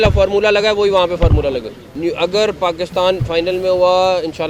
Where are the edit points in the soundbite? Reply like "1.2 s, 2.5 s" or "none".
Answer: none